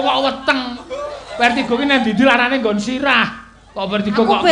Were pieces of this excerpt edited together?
no; 0 cuts

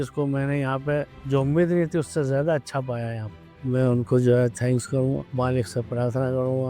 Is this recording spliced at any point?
yes; 2 cuts; at 1.2 s, 3.4 s

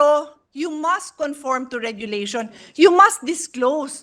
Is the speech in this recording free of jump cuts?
yes; 0 cuts

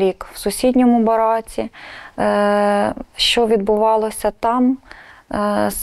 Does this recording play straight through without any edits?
yes; 0 cuts

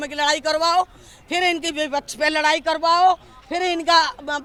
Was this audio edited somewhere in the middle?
no; 0 cuts

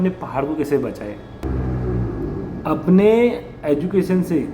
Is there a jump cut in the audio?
yes; 1 cut; at 1.4 s

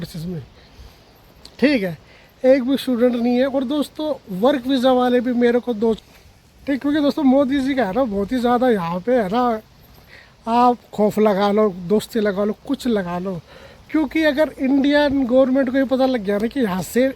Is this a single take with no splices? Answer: no; 1 cut; at 6.0 s

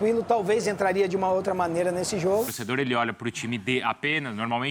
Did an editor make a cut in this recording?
yes; 1 cut; at 2.6 s

